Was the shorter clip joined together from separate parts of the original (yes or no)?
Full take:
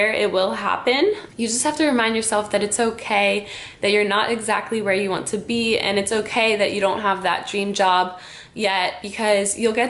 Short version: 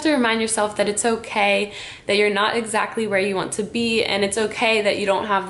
no